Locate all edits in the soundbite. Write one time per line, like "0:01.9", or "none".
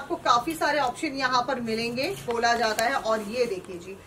0:02.3